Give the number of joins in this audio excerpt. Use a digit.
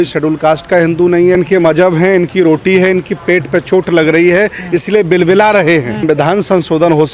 2